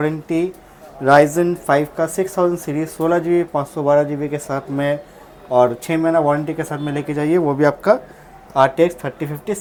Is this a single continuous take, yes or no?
yes